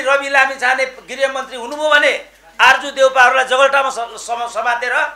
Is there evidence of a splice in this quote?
no; 0 cuts

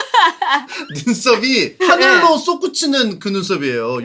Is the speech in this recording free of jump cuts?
no; 1 cut; at 1.8 s

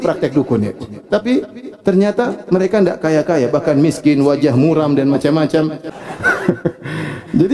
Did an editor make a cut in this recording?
yes; 1 cut; at 5.8 s

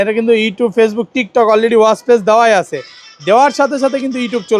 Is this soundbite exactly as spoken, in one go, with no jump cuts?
yes; 0 cuts

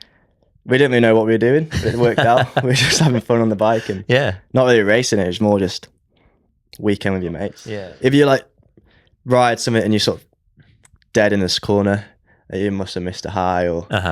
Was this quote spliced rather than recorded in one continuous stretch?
yes; 1 cut; at 7.6 s

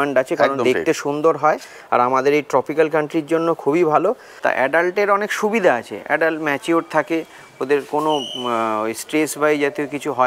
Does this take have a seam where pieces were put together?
yes; 1 cut; at 4.3 s

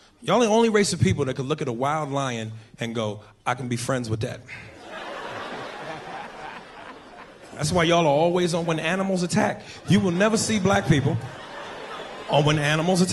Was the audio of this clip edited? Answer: no; 0 cuts

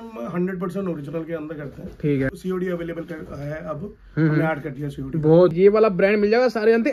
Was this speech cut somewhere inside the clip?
yes; 2 cuts; at 2.3 s, 5.5 s

